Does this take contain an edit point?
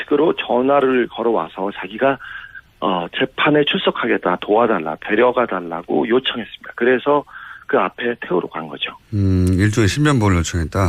yes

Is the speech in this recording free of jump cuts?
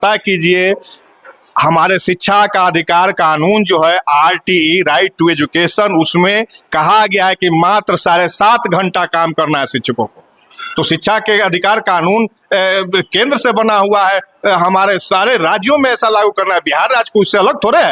yes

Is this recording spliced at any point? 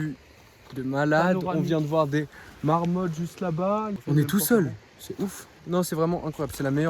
yes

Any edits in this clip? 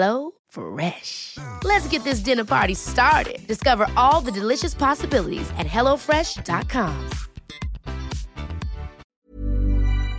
yes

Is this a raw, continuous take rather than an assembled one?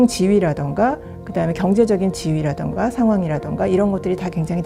yes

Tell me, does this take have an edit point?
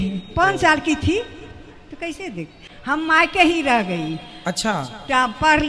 yes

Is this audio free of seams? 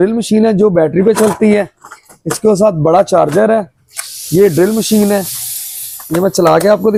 yes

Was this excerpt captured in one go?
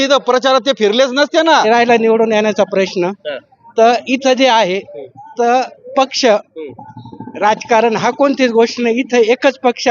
no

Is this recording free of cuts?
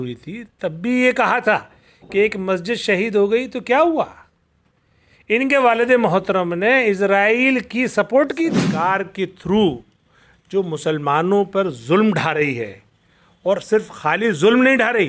no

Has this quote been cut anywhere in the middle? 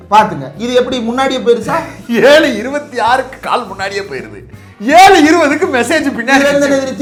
no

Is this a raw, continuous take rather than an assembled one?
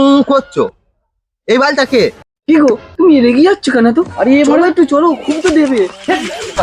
no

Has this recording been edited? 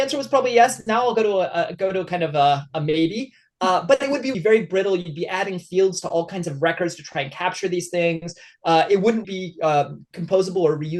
yes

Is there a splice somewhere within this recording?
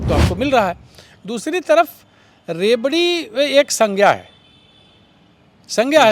no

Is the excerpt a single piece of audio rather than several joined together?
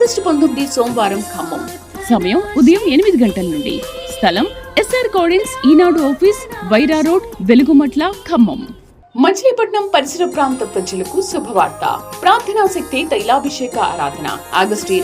yes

